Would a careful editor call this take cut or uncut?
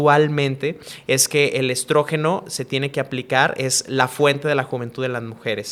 uncut